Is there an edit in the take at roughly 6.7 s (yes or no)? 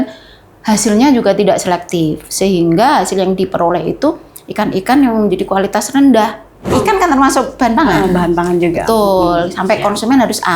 yes